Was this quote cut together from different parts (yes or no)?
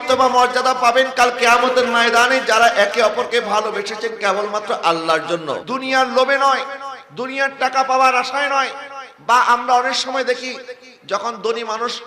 yes